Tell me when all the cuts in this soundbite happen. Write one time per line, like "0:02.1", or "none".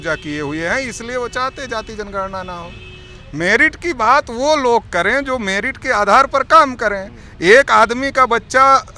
none